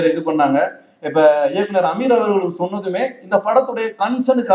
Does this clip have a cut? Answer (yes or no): no